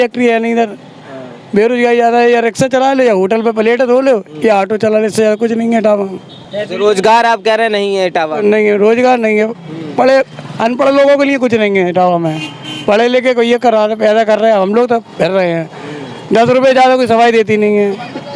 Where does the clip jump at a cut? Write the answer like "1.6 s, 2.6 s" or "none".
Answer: none